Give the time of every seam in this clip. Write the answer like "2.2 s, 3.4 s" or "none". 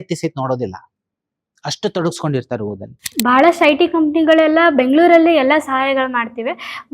3.0 s